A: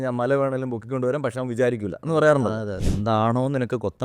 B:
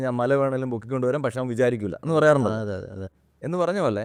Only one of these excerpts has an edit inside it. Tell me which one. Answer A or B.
A